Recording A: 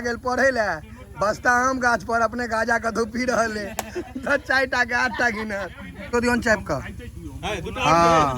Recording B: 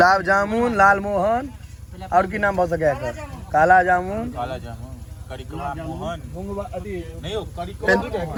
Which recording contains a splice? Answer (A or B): A